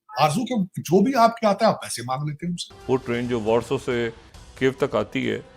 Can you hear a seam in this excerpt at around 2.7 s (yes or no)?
yes